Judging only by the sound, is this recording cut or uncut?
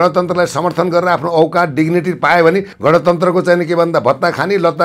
cut